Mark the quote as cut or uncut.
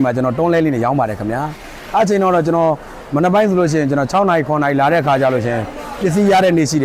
uncut